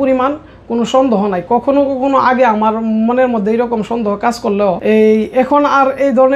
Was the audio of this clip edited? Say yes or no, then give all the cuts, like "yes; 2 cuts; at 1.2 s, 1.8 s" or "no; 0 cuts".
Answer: yes; 1 cut; at 4.8 s